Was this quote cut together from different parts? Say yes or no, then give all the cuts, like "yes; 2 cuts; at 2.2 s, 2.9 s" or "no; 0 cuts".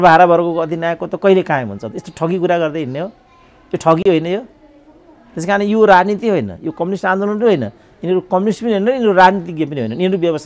no; 0 cuts